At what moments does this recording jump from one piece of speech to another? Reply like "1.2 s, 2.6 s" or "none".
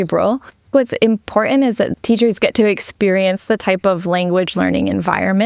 0.7 s, 1.9 s

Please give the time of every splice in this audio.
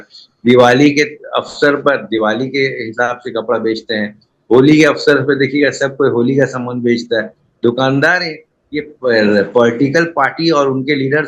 none

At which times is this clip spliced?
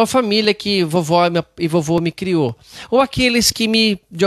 none

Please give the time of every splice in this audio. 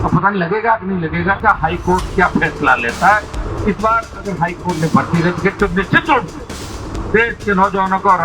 1.4 s

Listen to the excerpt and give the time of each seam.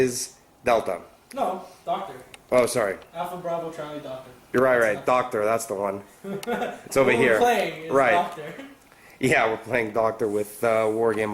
none

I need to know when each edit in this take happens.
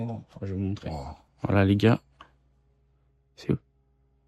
1.2 s

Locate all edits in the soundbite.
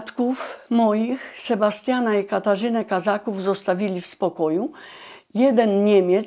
none

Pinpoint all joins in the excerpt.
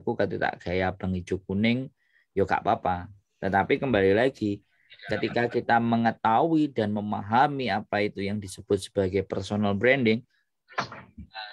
none

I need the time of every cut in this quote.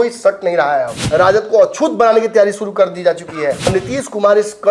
1.0 s, 3.7 s

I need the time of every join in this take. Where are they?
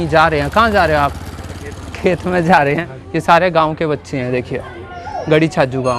3.0 s

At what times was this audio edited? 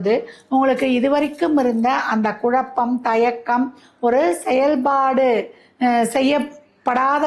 none

